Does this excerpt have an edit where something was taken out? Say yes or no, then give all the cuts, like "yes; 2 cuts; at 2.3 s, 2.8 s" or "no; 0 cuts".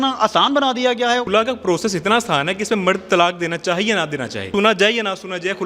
yes; 2 cuts; at 1.3 s, 4.5 s